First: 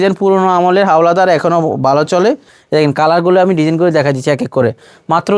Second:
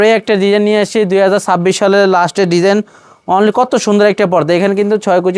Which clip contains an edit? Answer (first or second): first